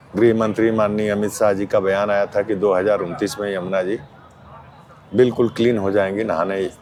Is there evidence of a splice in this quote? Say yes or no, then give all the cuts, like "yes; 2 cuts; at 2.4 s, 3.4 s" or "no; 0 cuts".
no; 0 cuts